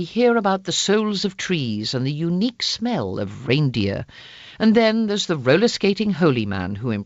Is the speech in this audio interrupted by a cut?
yes; 1 cut; at 6.0 s

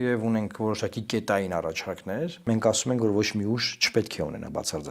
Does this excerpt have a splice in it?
yes; 1 cut; at 2.4 s

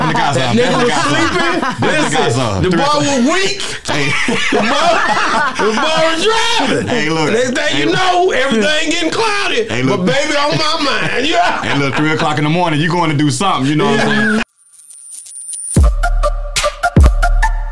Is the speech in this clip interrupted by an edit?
yes; 1 cut; at 14.5 s

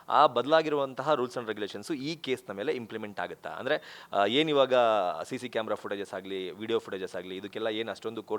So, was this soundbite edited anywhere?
no; 0 cuts

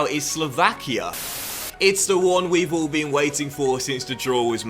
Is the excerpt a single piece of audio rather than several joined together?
no; 1 cut; at 1.4 s

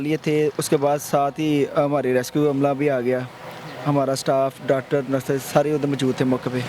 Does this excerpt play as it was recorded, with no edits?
yes; 0 cuts

